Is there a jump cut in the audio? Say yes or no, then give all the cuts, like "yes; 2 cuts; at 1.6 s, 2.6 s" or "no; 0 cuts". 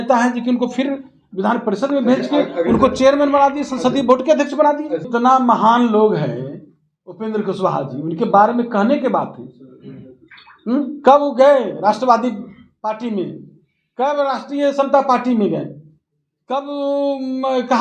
yes; 1 cut; at 5.0 s